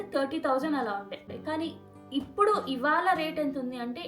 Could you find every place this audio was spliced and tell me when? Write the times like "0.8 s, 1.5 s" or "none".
1.3 s